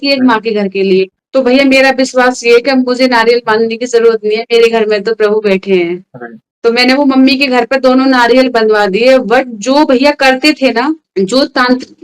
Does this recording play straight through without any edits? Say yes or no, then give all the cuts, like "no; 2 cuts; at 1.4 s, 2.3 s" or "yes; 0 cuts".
yes; 0 cuts